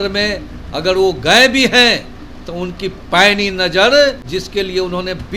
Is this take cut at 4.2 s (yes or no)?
yes